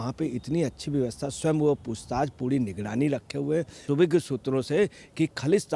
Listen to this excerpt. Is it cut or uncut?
cut